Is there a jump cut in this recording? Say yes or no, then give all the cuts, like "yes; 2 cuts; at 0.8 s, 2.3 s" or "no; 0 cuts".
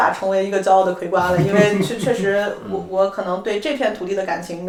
no; 0 cuts